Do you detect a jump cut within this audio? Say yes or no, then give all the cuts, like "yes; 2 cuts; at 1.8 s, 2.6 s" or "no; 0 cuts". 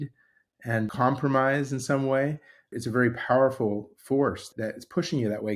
yes; 3 cuts; at 0.9 s, 2.6 s, 4.5 s